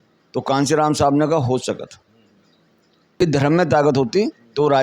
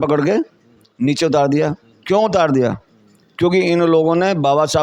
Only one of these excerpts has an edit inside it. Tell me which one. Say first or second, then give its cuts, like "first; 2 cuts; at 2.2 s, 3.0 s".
first; 1 cut; at 3.2 s